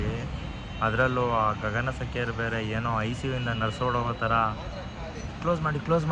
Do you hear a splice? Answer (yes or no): no